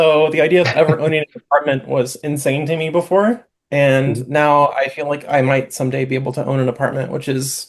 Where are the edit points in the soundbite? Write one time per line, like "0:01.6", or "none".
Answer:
none